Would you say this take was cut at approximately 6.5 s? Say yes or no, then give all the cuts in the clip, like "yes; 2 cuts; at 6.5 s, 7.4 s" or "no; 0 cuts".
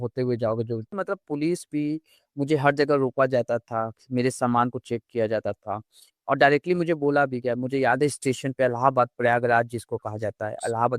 no; 1 cut; at 1.0 s